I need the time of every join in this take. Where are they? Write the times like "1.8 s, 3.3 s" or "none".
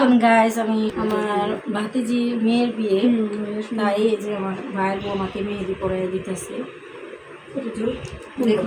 0.9 s